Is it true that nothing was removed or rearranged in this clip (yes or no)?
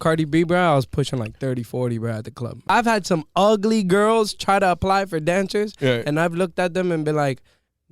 no